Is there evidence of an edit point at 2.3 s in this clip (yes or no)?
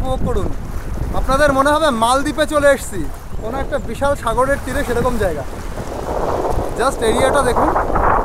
no